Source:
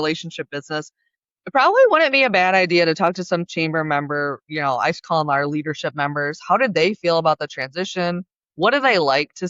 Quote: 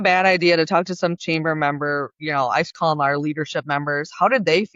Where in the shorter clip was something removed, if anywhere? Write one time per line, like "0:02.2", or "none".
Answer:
none